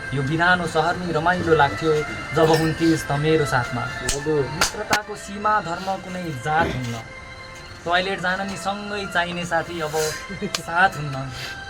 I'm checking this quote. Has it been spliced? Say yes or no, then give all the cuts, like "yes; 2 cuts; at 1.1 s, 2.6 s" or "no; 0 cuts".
yes; 1 cut; at 4.7 s